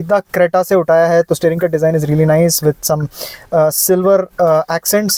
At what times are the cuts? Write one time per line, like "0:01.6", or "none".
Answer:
none